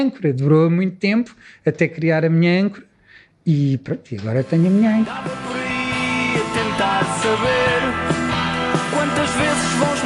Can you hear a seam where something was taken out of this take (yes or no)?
yes